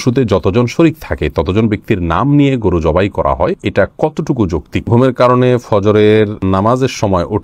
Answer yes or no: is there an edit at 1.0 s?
no